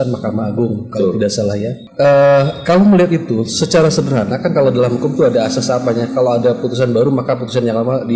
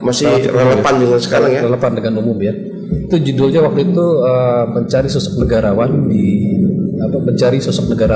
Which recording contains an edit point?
first; 1 cut; at 1.8 s

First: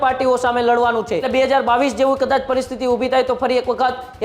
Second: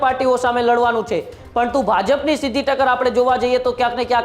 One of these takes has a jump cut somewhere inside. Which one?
first; 1 cut; at 1.3 s

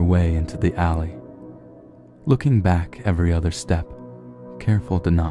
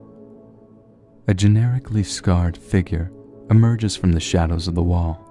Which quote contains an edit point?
first; 1 cut; at 4.4 s

